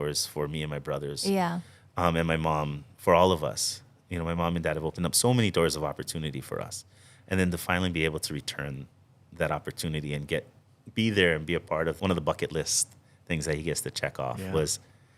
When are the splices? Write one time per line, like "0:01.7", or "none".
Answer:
0:12.0

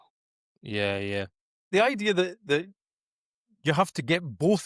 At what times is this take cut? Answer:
0:01.7

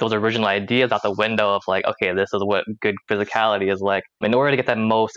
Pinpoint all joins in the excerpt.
0:03.0
0:04.2

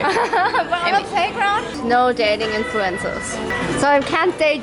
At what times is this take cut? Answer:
0:01.7
0:03.5

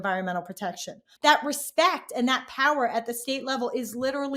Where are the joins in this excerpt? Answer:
0:01.0

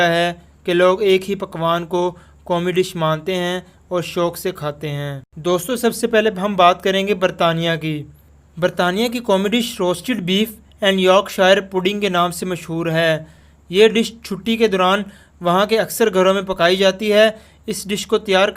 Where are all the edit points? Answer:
0:05.3

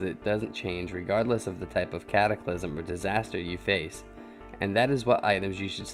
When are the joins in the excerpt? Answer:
0:02.3

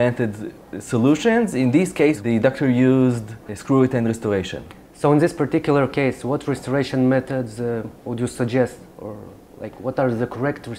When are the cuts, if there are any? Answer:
none

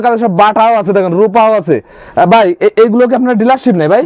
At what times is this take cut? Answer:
none

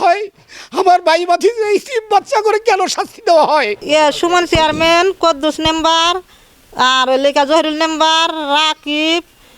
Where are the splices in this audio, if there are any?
0:03.8

